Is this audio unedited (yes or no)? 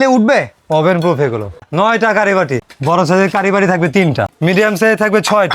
no